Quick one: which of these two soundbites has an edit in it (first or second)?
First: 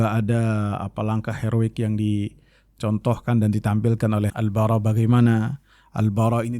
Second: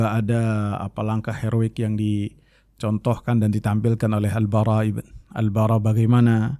first